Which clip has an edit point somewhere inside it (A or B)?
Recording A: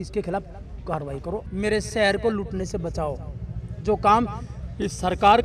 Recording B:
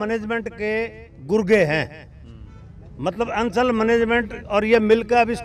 A